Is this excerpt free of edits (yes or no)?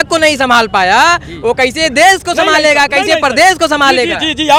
yes